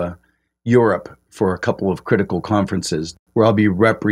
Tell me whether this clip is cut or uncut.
cut